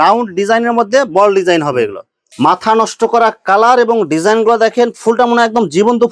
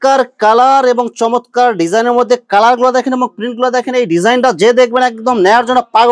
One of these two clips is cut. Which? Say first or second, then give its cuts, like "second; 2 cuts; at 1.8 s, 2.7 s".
first; 1 cut; at 2.2 s